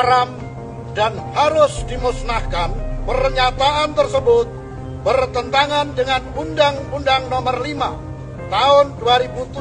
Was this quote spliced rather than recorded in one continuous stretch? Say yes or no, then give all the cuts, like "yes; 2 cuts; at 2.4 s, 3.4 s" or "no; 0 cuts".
no; 0 cuts